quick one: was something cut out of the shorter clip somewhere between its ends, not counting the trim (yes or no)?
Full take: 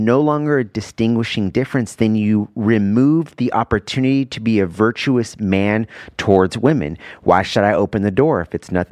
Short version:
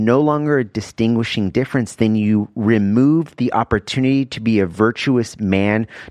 no